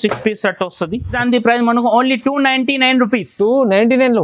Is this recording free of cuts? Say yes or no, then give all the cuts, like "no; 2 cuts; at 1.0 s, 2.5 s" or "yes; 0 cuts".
yes; 0 cuts